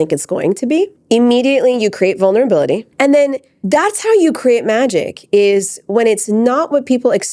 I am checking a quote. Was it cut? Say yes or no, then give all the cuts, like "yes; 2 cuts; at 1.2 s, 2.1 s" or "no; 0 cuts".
yes; 2 cuts; at 1.0 s, 3.0 s